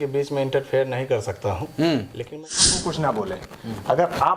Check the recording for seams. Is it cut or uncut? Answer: cut